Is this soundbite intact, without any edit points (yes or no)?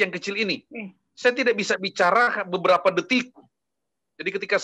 yes